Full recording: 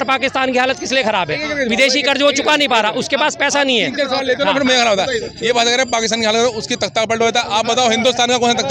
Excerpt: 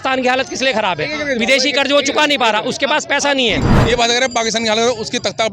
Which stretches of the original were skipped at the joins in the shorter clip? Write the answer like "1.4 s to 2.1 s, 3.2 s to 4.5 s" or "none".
3.9 s to 5.2 s